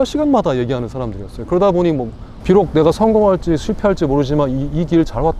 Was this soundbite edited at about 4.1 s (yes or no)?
no